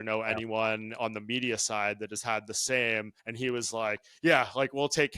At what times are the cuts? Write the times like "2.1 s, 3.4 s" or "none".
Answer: 3.2 s